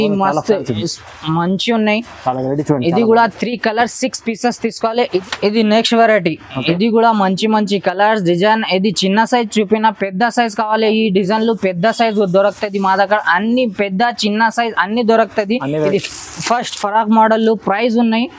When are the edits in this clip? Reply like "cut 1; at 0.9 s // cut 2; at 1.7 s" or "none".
cut 1; at 5.2 s // cut 2; at 15.9 s

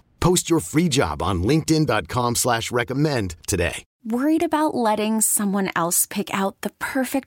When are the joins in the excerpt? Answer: cut 1; at 3.9 s

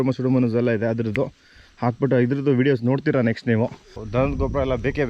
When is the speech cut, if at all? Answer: cut 1; at 4.0 s

